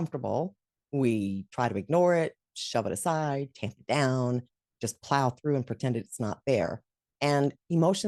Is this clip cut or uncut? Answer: uncut